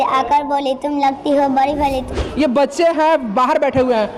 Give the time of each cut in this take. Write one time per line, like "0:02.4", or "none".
0:02.1